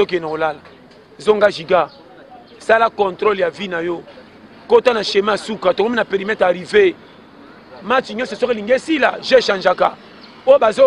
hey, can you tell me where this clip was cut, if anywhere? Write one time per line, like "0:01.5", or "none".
none